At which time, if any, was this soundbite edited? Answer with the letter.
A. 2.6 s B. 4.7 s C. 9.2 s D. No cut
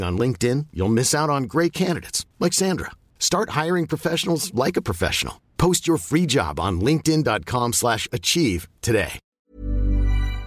C